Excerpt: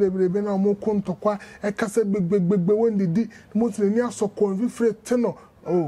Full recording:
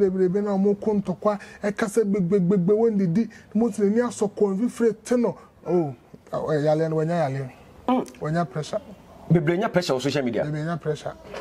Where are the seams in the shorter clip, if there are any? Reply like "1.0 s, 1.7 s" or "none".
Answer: none